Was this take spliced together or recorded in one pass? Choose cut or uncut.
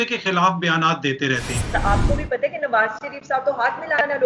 cut